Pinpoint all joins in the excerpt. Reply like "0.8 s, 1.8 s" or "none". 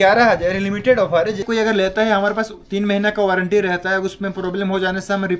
1.5 s